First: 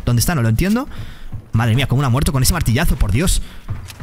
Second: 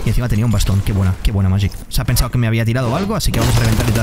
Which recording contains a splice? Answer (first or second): second